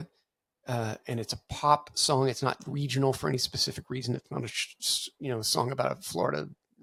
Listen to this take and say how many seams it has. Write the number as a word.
zero